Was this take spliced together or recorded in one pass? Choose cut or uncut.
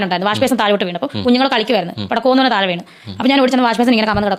uncut